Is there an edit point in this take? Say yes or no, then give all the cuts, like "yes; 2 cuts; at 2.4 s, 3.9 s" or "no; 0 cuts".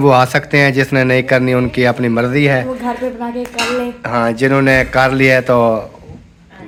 no; 0 cuts